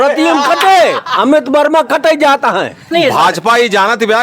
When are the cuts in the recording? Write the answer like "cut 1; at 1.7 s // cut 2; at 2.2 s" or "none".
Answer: cut 1; at 2.9 s